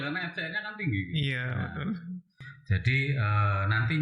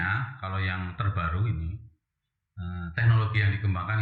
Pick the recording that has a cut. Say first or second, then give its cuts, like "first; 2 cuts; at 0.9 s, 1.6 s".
first; 1 cut; at 2.5 s